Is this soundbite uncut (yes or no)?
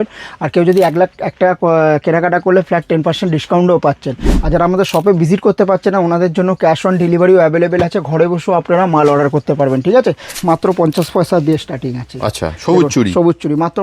no